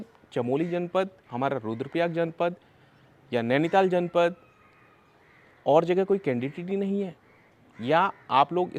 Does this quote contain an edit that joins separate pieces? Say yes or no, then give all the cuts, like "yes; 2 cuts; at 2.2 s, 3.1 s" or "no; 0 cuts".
no; 0 cuts